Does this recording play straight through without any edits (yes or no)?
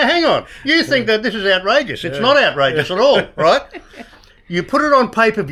yes